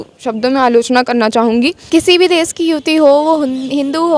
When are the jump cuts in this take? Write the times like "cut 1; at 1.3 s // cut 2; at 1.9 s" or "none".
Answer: cut 1; at 1.8 s